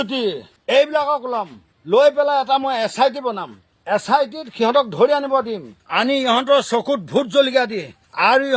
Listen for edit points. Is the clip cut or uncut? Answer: cut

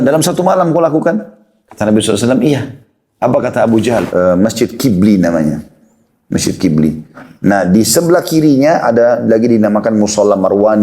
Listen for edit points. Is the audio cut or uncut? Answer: cut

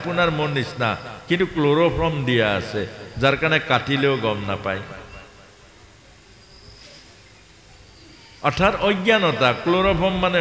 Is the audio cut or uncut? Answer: uncut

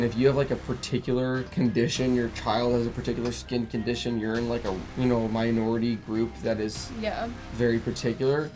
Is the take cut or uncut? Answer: uncut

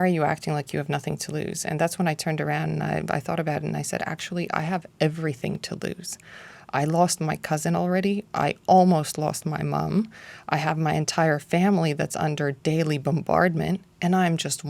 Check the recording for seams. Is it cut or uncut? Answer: uncut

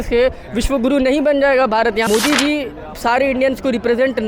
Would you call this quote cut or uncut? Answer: cut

